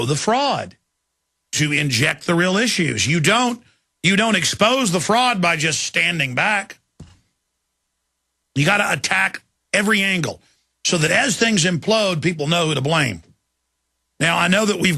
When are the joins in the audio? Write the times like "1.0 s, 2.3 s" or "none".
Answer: none